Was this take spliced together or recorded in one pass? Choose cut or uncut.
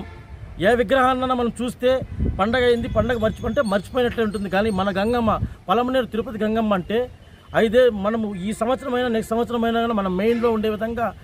uncut